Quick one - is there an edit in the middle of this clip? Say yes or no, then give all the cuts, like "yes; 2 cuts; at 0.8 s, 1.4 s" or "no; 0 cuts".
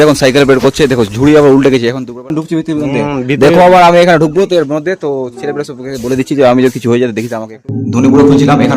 yes; 2 cuts; at 2.1 s, 7.6 s